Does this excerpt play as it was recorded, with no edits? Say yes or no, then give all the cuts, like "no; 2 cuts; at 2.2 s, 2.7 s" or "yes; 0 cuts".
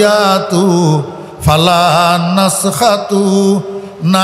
yes; 0 cuts